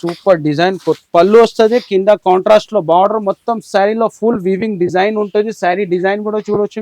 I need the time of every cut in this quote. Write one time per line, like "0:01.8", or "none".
0:01.0